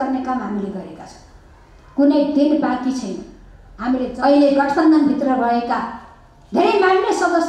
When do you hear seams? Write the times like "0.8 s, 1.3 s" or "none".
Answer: 4.1 s